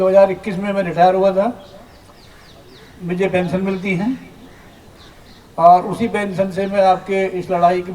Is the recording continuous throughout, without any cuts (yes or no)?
yes